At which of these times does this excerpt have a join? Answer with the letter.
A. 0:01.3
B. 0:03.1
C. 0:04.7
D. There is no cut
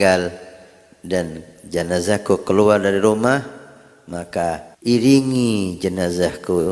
C